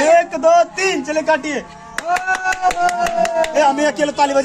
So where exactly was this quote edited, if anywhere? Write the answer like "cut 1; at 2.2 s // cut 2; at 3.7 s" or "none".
none